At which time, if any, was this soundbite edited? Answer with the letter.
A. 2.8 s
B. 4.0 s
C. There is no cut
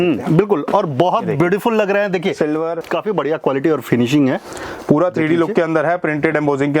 A